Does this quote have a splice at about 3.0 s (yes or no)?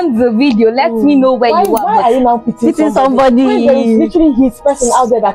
no